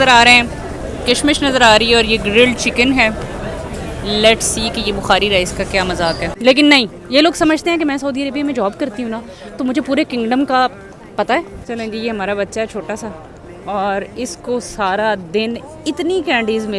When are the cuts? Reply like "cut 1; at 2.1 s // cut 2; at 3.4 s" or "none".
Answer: cut 1; at 6.3 s // cut 2; at 11.6 s